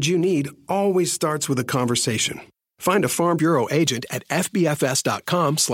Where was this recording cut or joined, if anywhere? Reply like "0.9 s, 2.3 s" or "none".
none